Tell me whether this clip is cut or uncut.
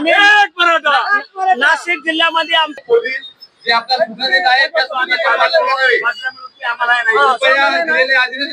cut